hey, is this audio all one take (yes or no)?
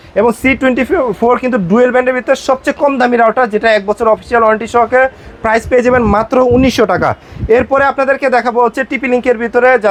yes